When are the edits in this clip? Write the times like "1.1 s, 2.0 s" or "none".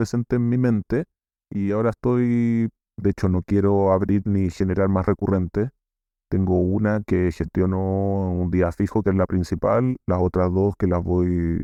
none